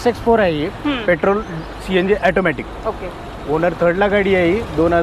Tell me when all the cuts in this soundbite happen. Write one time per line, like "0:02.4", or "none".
none